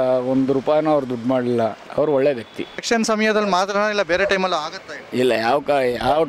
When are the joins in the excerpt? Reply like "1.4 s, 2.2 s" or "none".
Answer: 1.8 s, 2.8 s